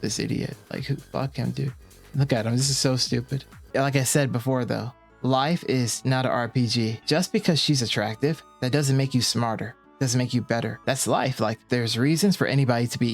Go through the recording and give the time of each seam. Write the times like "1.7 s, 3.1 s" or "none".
3.6 s, 7.0 s